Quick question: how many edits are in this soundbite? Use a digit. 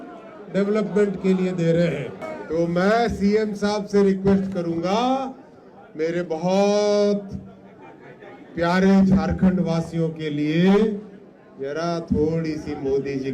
1